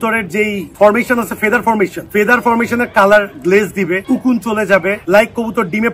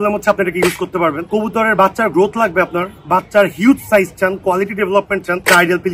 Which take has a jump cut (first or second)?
first